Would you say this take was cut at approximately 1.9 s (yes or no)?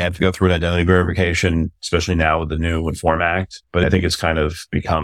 no